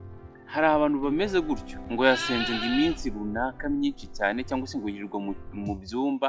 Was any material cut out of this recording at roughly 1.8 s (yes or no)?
yes